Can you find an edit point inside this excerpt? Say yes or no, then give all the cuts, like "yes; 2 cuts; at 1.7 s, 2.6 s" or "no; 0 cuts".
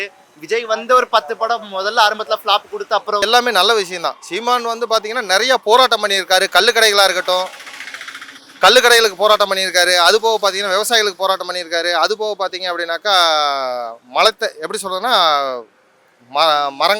yes; 1 cut; at 3.2 s